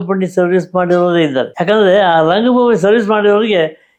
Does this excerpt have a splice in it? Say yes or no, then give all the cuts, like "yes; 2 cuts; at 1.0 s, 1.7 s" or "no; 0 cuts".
no; 0 cuts